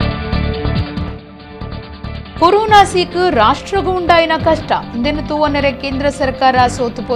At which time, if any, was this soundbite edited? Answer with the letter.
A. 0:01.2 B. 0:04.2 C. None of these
A